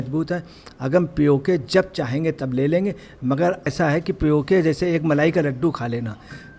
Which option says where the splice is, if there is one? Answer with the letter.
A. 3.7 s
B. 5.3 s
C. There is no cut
A